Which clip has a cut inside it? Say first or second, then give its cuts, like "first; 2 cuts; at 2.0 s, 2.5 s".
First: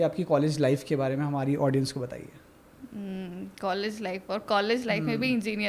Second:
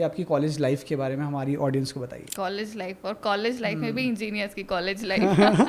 second; 1 cut; at 2.2 s